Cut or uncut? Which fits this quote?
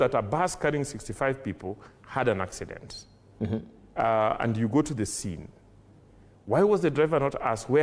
uncut